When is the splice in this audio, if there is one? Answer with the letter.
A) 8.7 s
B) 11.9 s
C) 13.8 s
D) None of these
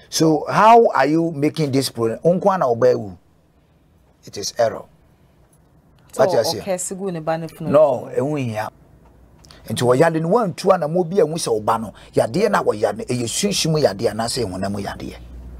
A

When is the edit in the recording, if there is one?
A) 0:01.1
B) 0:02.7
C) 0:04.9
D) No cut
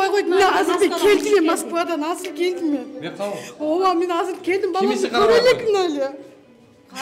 D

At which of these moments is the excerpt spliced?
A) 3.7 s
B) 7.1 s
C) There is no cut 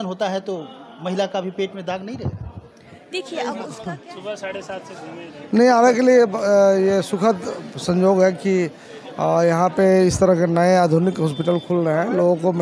A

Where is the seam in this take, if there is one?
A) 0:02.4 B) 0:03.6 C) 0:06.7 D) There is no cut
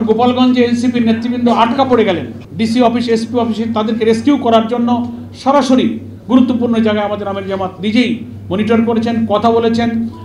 A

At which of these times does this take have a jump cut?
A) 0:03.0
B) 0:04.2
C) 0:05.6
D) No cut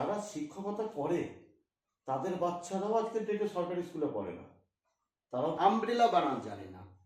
C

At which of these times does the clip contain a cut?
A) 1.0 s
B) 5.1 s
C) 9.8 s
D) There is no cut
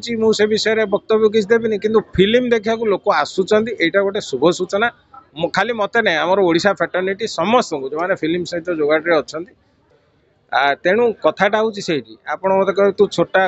C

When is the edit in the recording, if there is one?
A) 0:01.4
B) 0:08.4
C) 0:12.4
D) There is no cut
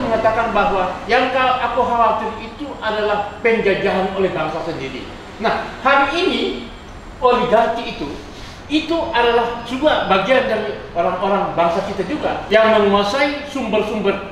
C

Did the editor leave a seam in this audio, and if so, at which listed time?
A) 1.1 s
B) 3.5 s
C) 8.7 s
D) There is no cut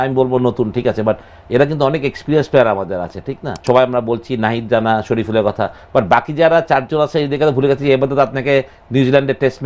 B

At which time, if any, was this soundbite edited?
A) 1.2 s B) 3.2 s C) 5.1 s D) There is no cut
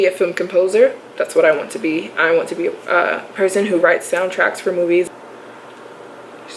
C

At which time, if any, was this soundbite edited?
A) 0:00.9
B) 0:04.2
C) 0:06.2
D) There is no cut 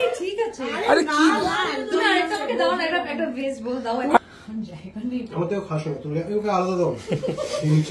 B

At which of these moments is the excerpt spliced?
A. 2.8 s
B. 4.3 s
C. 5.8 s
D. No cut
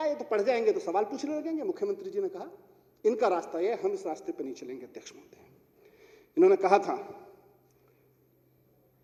D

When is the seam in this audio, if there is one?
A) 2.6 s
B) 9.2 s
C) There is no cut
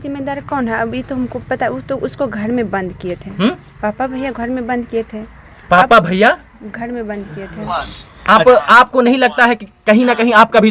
C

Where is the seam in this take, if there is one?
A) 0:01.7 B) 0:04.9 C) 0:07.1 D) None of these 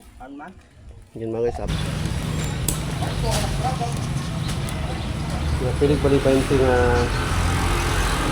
A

